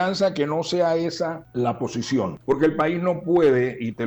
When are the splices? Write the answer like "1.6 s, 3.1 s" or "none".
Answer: 1.4 s, 2.4 s

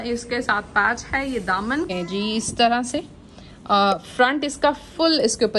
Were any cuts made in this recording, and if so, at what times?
1.9 s

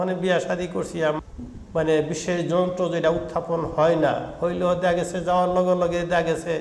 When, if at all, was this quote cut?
1.2 s

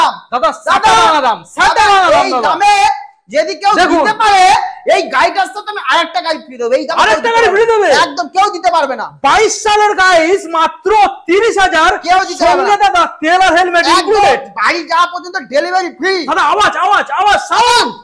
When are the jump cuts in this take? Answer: none

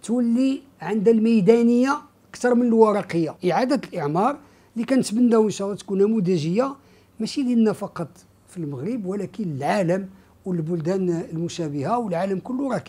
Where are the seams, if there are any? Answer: 3.3 s

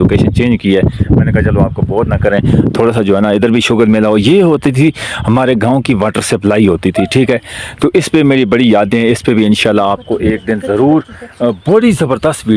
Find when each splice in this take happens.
none

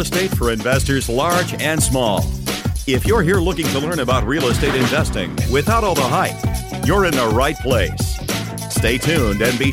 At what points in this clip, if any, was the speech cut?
none

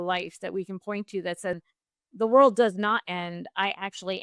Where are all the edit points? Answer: 1.6 s

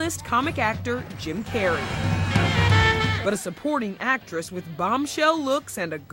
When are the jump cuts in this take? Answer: 1.1 s

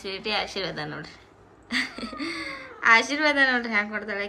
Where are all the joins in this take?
none

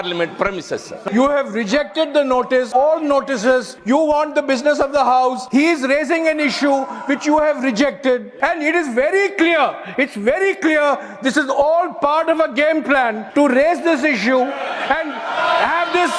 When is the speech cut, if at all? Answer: 0.9 s, 2.7 s, 3.7 s, 5.4 s, 8.3 s, 13.2 s

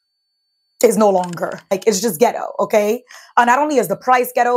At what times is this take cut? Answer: 1.7 s

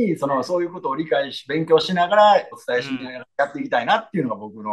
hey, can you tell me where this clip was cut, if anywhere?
none

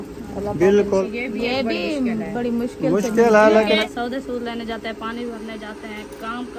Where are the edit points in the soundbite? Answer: 1.1 s, 3.8 s

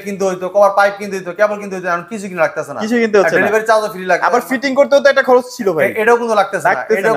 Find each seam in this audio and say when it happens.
none

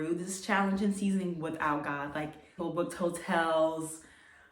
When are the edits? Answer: 2.4 s

